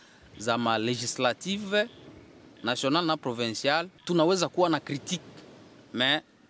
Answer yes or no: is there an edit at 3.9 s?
yes